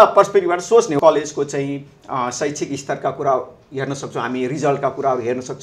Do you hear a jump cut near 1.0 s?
yes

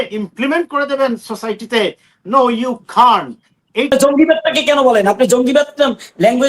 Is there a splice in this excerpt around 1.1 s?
no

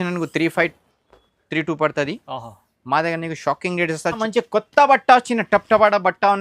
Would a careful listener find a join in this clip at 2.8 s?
no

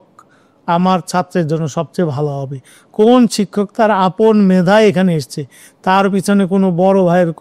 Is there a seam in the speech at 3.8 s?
no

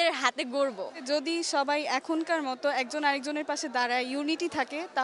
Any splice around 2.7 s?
no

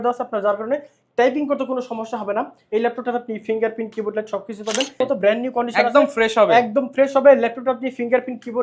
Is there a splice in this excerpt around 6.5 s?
no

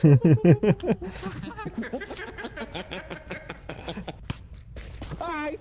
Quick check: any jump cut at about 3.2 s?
no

